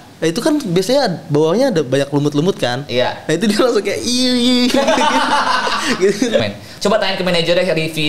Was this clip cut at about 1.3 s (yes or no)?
no